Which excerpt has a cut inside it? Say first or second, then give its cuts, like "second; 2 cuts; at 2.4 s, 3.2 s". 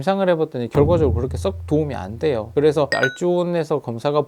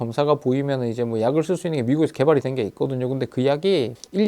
first; 1 cut; at 2.9 s